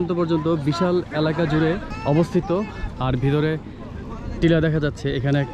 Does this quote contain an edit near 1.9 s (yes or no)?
yes